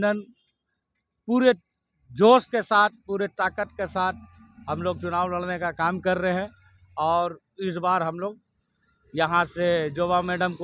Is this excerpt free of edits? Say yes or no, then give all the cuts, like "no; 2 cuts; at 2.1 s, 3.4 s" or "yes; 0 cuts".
yes; 0 cuts